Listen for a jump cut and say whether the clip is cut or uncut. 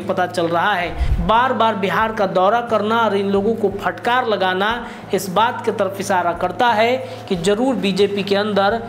cut